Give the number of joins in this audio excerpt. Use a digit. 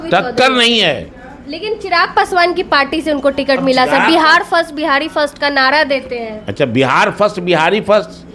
0